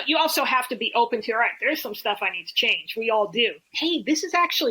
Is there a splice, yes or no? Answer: yes